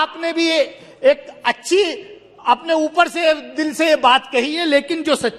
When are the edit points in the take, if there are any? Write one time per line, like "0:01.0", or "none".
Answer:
none